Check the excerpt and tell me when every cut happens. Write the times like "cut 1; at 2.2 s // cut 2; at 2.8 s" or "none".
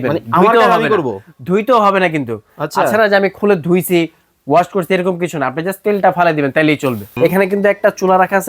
cut 1; at 7.1 s